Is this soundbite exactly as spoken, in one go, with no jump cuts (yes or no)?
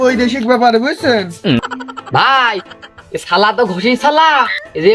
no